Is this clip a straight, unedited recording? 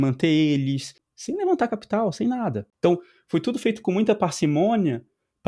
no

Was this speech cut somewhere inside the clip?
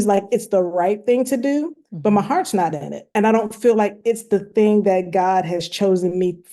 yes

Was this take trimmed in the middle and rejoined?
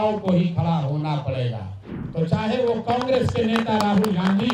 yes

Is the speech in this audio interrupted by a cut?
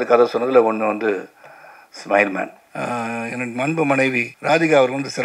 yes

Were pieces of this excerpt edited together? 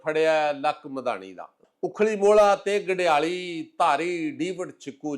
yes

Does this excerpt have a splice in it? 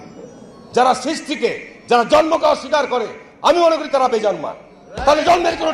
no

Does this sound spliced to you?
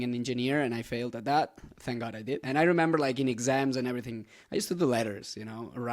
yes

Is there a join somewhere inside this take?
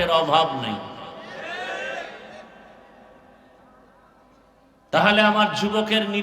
no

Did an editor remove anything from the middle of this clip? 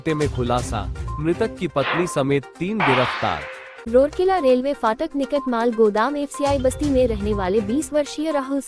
yes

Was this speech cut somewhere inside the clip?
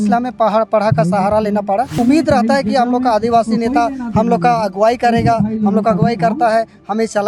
yes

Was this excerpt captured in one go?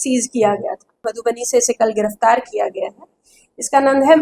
no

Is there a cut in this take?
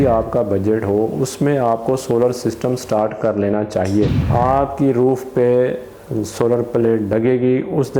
yes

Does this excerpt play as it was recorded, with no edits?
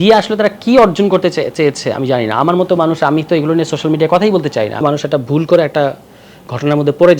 no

